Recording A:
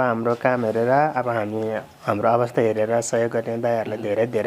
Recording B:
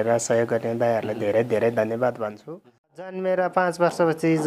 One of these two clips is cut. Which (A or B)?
B